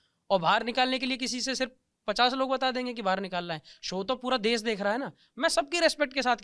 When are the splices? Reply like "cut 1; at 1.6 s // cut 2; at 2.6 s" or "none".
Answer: none